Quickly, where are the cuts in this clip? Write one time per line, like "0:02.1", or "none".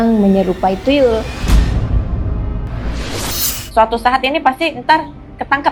0:01.4
0:03.7